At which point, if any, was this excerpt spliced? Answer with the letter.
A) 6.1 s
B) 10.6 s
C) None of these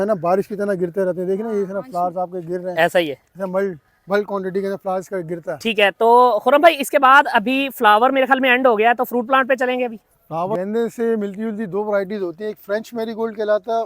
B